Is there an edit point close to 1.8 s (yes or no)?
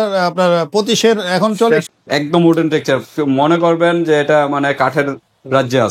yes